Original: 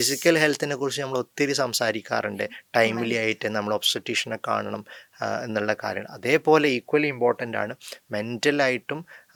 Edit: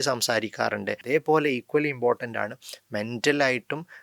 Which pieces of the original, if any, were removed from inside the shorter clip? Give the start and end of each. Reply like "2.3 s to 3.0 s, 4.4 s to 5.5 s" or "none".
2.5 s to 6.2 s